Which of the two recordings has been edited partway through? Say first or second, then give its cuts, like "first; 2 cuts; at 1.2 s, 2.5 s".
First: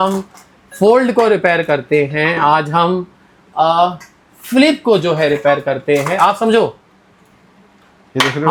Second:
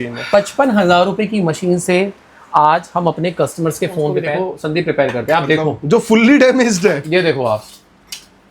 second; 1 cut; at 4.3 s